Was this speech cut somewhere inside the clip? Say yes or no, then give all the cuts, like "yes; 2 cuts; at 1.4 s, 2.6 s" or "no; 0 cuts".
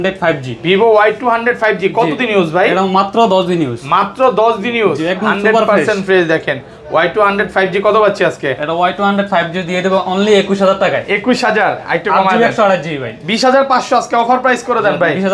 no; 0 cuts